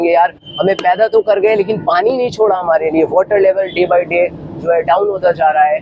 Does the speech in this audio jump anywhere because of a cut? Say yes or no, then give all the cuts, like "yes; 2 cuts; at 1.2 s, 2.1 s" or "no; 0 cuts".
no; 0 cuts